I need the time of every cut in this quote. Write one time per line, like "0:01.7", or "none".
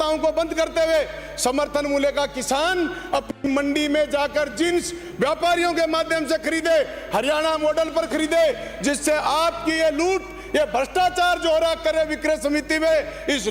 none